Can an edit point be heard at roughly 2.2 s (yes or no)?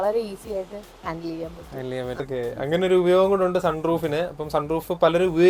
yes